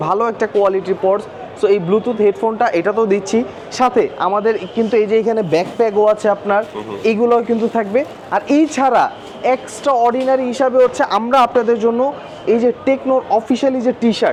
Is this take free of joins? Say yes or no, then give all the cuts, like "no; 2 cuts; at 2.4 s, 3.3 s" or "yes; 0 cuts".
yes; 0 cuts